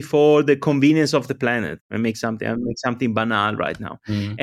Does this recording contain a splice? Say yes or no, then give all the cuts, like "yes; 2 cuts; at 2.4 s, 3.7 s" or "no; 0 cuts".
no; 0 cuts